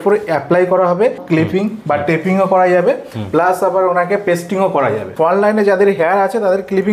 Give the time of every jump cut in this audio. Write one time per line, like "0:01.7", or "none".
0:01.2
0:05.1